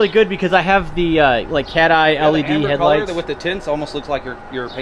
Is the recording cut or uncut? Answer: uncut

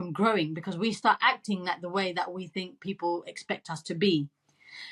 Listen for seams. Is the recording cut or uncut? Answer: uncut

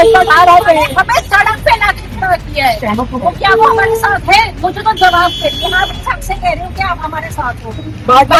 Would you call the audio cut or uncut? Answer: uncut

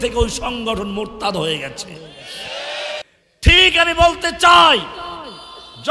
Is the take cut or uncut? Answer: cut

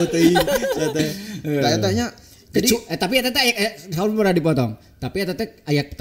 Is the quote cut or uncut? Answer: uncut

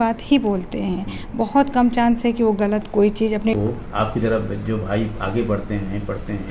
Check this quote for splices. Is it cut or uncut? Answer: cut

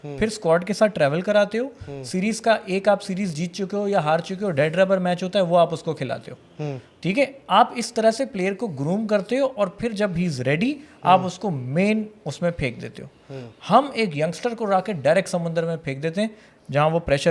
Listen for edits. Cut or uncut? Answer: uncut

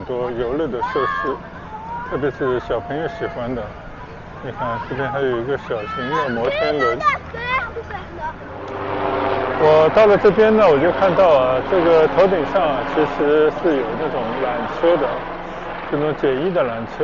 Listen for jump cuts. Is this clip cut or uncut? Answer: cut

